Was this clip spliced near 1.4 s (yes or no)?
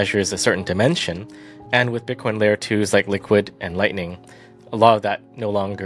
no